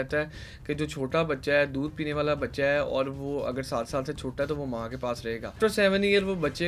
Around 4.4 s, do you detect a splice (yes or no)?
no